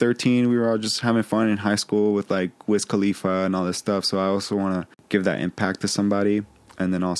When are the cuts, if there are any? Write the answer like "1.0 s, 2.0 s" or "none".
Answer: 4.9 s